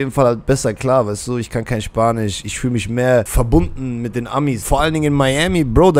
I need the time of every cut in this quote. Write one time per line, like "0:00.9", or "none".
0:03.3
0:04.6